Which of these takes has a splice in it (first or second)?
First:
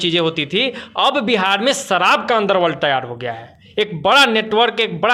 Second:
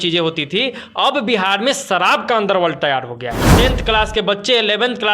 second